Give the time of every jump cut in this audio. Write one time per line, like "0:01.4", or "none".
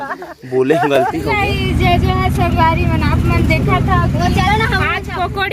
0:01.3